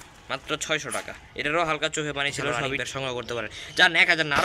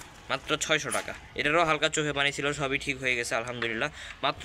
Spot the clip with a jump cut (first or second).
first